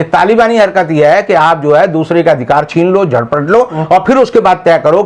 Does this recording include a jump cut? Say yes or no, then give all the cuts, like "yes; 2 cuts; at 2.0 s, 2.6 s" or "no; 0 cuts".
no; 0 cuts